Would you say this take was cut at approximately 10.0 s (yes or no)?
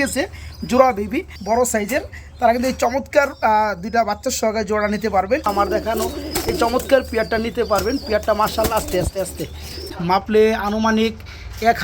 yes